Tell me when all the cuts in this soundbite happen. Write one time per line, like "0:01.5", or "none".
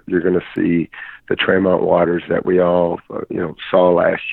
none

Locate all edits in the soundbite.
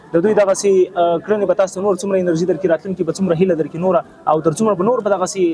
none

